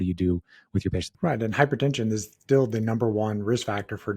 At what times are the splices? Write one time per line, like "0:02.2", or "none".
0:01.1